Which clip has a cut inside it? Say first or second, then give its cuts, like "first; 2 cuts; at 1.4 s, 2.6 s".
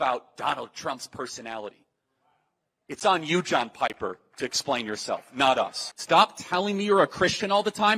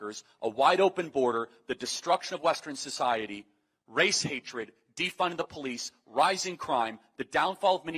first; 1 cut; at 5.9 s